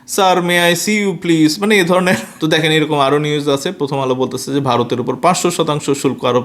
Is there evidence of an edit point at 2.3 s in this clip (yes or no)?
yes